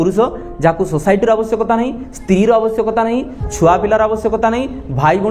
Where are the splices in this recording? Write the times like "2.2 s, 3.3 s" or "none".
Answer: none